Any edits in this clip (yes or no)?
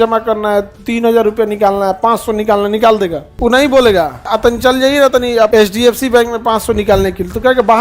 yes